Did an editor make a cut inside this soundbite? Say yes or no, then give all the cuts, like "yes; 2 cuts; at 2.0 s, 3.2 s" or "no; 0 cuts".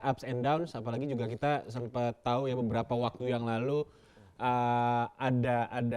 no; 0 cuts